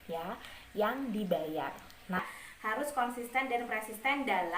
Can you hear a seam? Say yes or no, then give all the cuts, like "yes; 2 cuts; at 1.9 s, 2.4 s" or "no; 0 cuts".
yes; 1 cut; at 2.2 s